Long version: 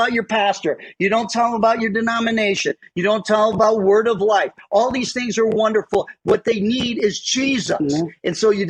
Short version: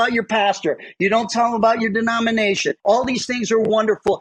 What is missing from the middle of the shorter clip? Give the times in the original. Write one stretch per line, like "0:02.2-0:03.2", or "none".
0:02.7-0:04.6